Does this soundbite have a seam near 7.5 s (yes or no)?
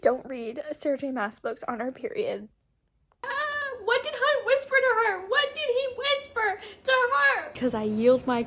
yes